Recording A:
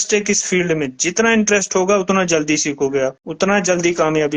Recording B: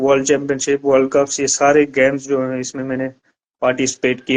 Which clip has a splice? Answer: A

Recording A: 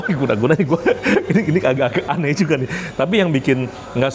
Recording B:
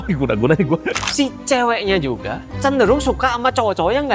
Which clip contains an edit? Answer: B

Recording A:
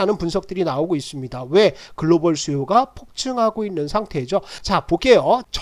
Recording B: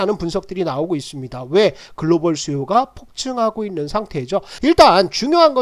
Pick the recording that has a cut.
B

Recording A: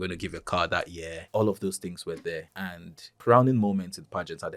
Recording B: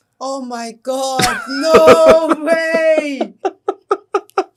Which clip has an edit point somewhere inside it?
A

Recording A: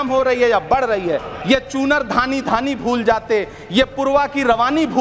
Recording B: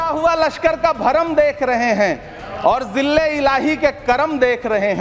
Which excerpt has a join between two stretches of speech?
A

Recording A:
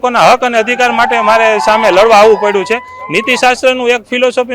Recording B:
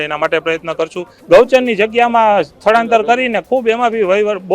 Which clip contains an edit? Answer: B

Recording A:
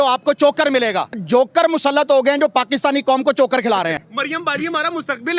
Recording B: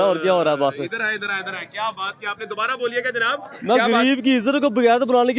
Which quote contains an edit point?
A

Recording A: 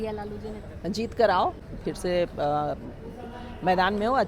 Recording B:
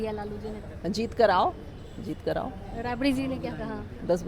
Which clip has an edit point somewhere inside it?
A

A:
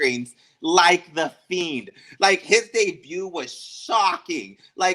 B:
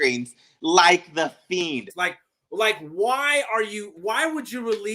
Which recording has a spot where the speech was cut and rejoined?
B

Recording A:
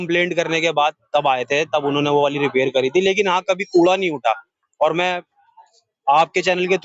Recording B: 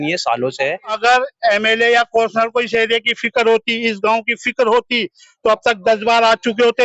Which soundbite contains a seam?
B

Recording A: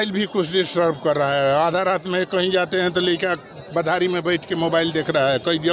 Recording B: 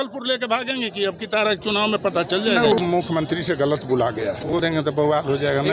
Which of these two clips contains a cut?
B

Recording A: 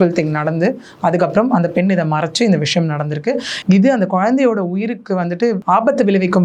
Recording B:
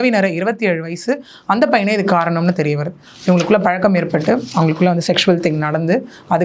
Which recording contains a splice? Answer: A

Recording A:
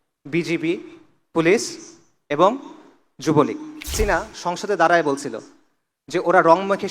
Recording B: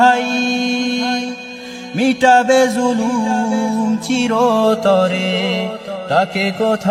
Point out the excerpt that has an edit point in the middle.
A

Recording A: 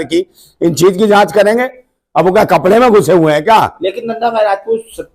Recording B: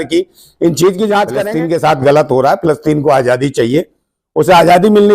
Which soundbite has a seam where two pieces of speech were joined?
B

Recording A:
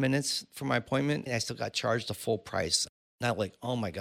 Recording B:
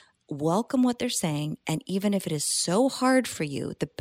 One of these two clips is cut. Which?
A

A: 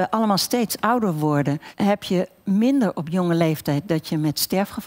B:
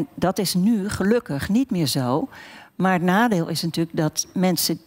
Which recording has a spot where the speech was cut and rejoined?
A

